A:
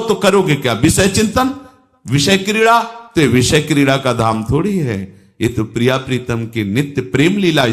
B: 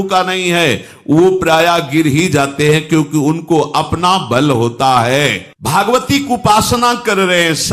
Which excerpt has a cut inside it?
B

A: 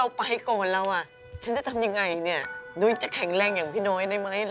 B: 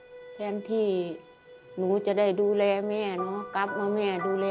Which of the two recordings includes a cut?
A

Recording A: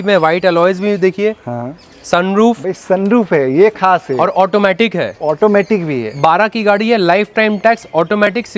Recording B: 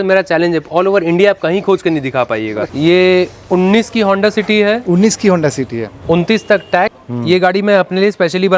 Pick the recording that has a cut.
B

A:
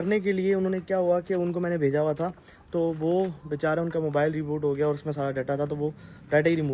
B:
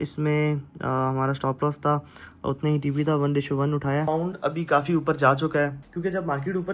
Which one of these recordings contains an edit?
B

